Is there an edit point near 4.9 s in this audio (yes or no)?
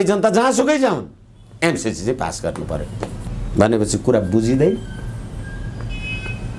no